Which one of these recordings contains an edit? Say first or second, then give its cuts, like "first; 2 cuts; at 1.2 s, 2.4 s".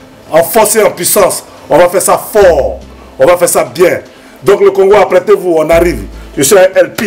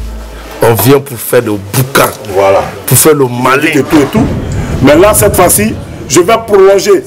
second; 1 cut; at 3.6 s